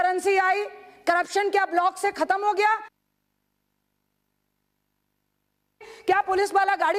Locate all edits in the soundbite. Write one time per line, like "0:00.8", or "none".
none